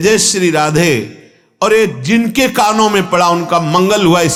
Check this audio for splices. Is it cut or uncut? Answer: uncut